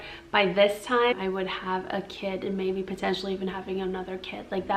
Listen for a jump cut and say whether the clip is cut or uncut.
cut